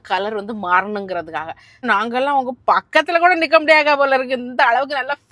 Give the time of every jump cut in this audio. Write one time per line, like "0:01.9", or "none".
0:01.8